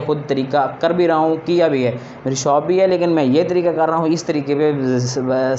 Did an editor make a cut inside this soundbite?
no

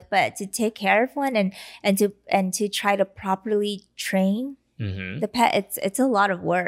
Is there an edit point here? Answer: no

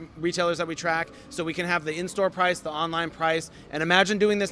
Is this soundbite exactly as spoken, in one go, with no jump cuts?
yes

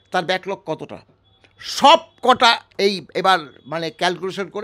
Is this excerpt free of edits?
yes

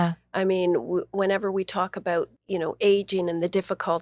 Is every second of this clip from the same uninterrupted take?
no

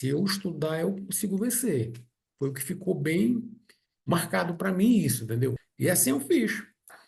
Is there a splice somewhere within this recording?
no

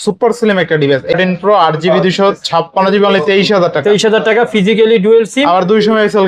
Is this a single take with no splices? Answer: no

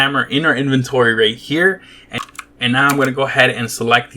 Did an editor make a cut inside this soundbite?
yes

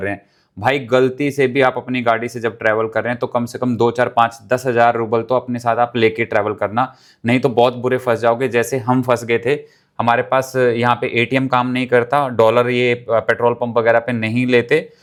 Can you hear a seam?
no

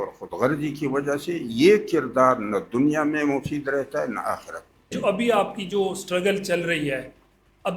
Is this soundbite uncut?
no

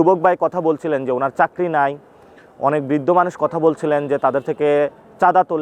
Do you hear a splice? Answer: no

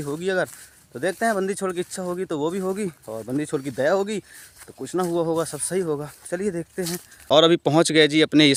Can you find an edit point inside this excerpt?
no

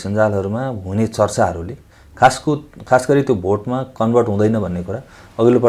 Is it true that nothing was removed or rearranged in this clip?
yes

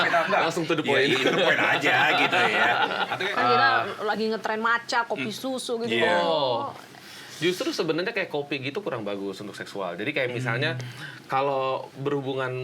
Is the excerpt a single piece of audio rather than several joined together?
no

